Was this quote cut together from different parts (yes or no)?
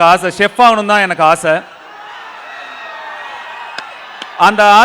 no